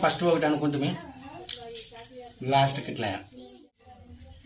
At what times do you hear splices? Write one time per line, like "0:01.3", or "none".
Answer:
0:03.5